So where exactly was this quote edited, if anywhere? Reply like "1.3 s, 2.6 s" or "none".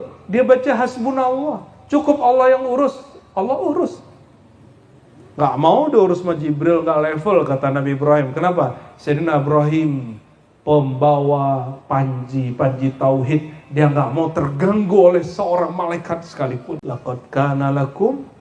16.9 s